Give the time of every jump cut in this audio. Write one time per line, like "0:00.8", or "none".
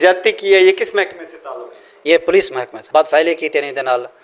0:02.7